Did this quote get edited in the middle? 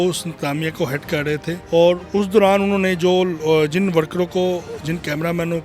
yes; 1 cut; at 1.6 s

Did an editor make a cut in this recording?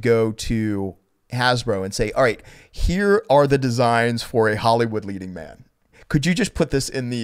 no; 0 cuts

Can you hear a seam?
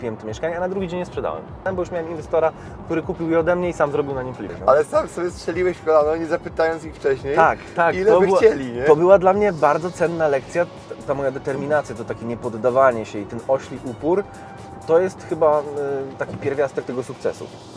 yes; 3 cuts; at 1.7 s, 4.5 s, 10.8 s

